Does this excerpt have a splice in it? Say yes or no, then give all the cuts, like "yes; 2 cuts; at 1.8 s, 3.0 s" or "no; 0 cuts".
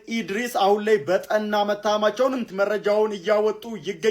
yes; 1 cut; at 2.5 s